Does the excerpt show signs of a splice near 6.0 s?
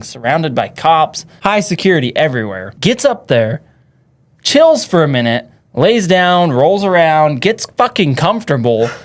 no; 2 cuts; at 1.3 s, 2.6 s

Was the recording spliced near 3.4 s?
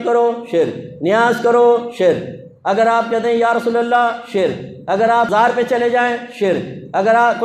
no; 1 cut; at 5.3 s

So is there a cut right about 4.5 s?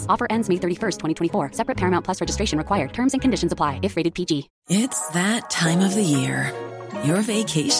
yes; 1 cut; at 4.5 s

